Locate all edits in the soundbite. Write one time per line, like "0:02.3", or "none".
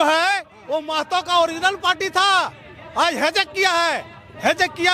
none